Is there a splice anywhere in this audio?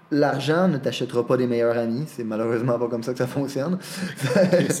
no; 0 cuts

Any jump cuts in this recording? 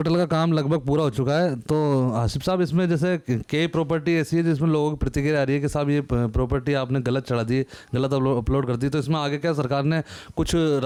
no; 0 cuts

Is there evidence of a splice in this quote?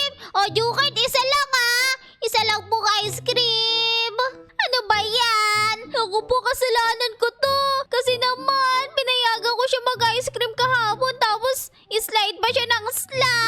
yes; 1 cut; at 4.5 s

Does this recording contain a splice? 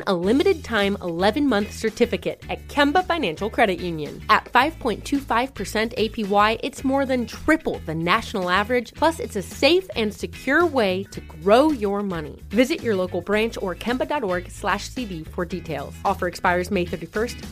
no; 0 cuts

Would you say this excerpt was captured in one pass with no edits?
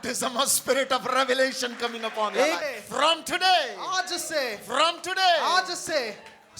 no; 1 cut; at 2.6 s

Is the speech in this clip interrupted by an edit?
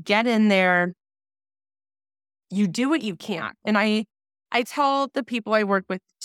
no; 0 cuts

